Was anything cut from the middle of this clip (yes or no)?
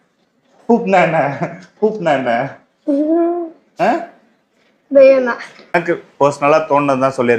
yes